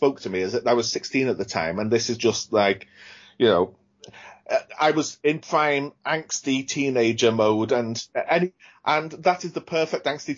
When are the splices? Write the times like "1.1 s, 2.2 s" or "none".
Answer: 8.7 s